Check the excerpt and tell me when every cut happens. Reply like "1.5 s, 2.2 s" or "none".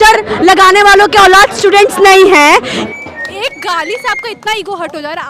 2.8 s